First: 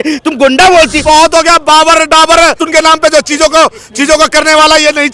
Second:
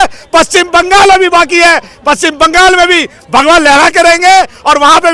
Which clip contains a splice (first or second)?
first